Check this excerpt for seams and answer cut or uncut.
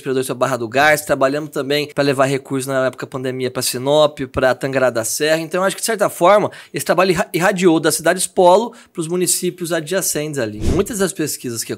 cut